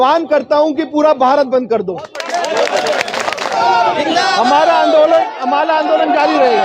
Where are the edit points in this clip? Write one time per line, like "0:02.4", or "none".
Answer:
0:03.5